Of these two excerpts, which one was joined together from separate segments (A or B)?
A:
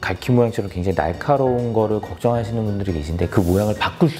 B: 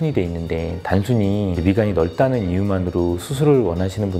B